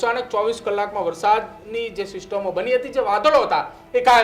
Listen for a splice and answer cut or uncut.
uncut